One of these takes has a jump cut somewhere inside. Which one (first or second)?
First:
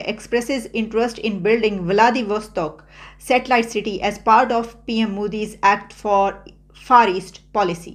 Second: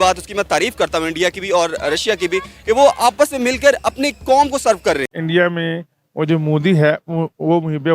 second